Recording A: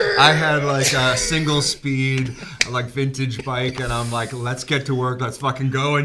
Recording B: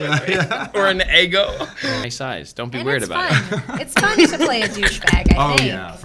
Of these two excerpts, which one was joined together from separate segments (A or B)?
B